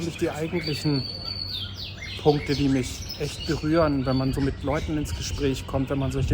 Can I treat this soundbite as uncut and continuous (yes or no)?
yes